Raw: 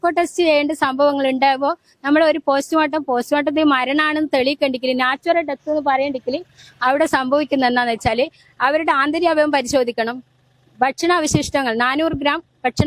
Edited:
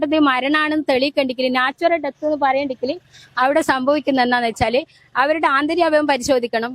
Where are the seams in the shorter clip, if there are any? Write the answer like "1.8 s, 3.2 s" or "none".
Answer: none

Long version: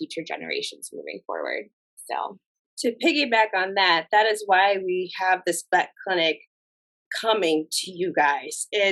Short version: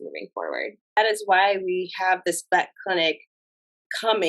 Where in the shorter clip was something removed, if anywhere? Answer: 1.0 s

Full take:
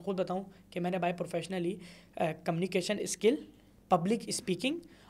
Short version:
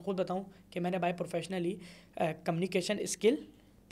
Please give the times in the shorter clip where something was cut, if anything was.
none

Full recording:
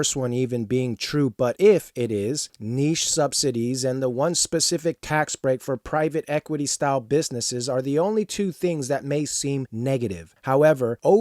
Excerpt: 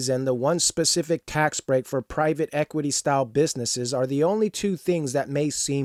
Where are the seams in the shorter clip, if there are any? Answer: none

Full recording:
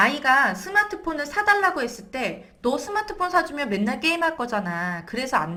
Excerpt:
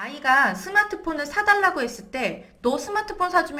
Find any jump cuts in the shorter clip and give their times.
none

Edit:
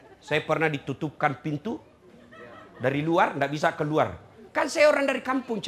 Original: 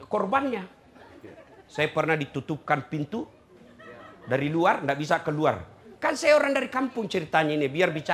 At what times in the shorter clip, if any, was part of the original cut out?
none

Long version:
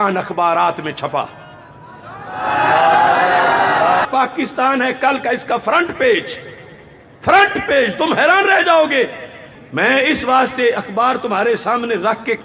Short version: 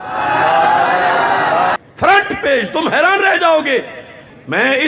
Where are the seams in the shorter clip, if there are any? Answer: 1.8 s

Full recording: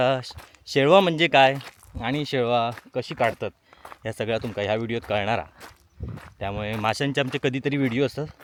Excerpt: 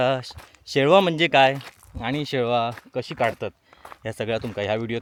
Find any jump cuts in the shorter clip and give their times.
none

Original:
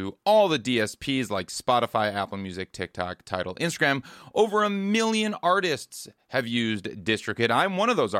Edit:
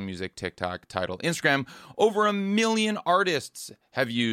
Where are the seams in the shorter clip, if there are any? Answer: none

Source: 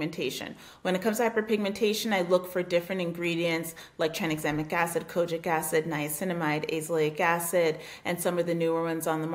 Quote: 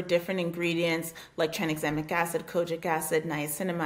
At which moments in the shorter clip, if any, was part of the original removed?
none

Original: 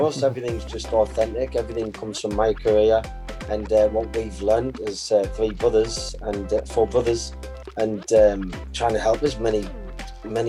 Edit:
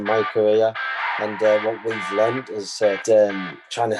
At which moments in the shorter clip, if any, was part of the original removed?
3.0 s

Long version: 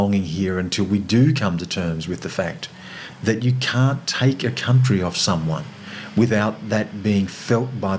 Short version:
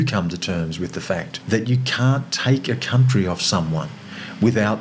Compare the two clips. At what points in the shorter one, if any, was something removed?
1.3 s

